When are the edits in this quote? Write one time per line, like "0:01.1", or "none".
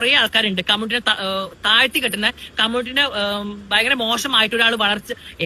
none